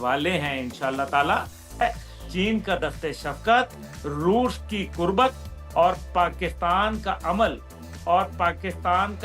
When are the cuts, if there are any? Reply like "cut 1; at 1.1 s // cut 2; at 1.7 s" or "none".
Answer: cut 1; at 1.8 s